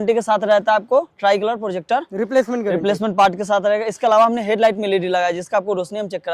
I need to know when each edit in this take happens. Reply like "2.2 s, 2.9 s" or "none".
none